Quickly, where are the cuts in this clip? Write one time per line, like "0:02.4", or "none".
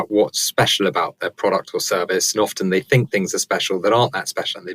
none